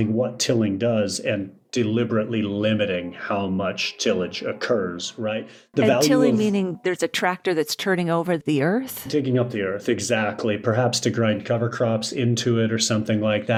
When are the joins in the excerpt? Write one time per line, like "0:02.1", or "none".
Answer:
none